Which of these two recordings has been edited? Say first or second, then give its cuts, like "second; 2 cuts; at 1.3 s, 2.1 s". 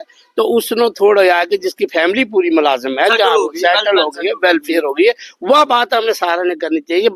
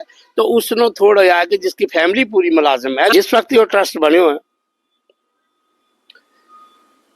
second; 1 cut; at 3.1 s